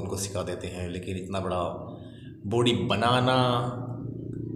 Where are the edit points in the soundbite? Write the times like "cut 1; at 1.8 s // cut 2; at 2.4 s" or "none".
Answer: none